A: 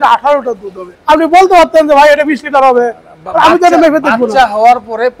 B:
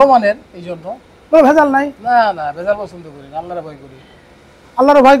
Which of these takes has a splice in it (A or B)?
A